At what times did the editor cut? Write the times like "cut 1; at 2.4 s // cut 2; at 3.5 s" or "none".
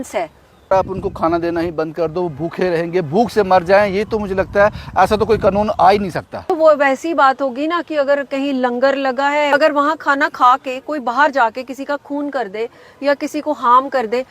cut 1; at 0.7 s // cut 2; at 6.5 s // cut 3; at 9.5 s